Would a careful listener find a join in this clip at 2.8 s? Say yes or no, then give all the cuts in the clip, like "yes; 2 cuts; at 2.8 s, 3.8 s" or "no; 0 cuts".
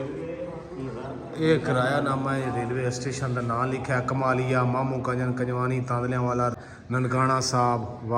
no; 1 cut; at 6.5 s